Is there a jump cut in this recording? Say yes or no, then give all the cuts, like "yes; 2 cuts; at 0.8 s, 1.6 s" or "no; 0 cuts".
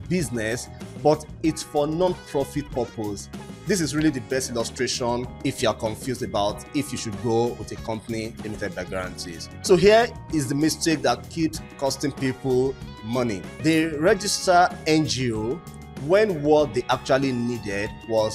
yes; 3 cuts; at 5.3 s, 9.5 s, 13.5 s